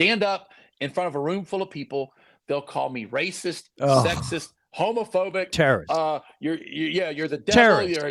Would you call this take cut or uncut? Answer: uncut